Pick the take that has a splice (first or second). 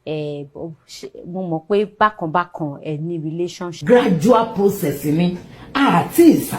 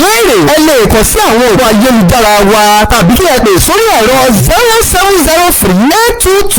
first